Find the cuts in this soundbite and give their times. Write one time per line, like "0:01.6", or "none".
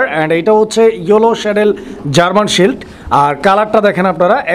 none

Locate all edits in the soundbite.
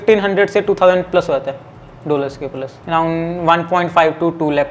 none

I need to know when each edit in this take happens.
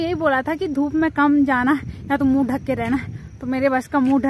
none

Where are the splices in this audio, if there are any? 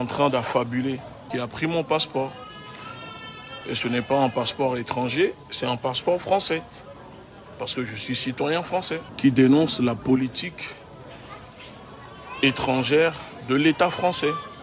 0:01.2
0:09.1

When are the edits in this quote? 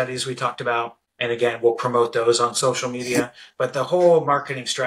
0:01.0

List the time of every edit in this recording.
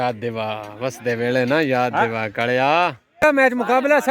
0:03.2

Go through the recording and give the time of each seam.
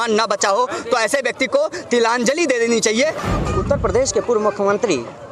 0:03.2

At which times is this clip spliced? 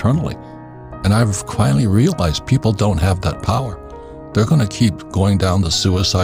none

